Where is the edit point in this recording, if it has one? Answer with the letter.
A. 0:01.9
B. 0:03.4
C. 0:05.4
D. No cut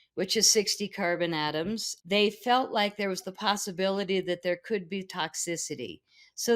A